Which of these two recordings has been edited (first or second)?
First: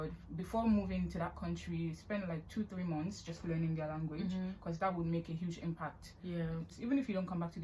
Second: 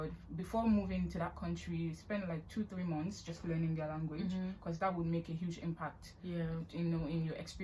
first